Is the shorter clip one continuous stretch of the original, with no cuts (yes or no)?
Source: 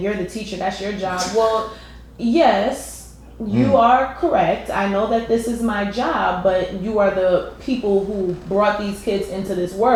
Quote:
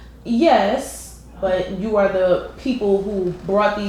no